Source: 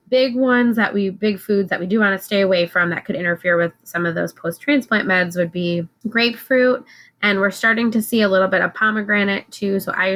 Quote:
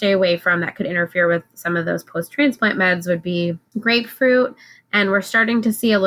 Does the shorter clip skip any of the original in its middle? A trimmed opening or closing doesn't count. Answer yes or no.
no